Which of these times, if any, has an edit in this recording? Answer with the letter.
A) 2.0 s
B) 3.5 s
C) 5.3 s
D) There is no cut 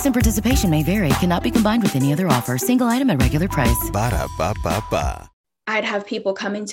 C